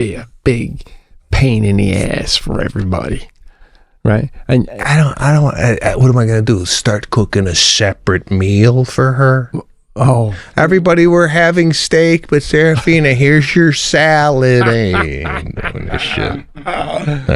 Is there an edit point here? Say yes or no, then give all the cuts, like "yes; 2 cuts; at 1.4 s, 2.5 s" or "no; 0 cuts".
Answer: no; 0 cuts